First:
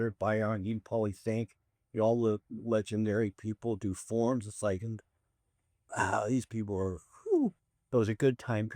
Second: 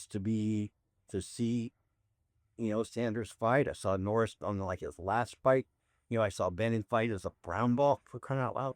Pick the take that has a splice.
first; 1 cut; at 7.7 s

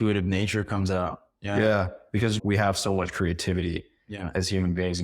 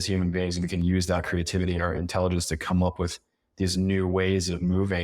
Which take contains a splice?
first; 1 cut; at 2.4 s

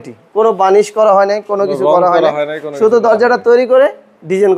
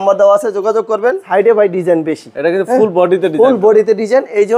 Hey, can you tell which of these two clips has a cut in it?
second; 1 cut; at 1.2 s

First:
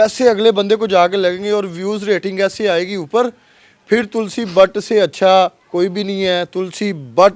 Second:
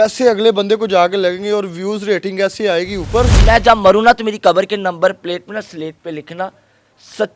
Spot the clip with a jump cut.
second; 1 cut; at 3.4 s

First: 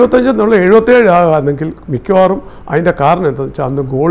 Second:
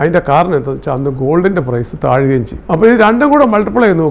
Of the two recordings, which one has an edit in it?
second; 1 cut; at 2.5 s

